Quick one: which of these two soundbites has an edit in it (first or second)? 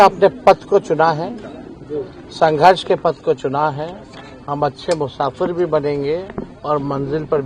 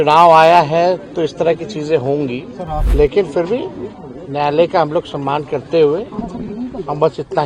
second